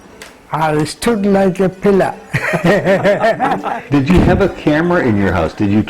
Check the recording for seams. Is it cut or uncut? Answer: cut